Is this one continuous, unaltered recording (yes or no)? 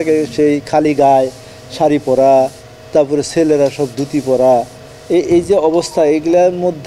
yes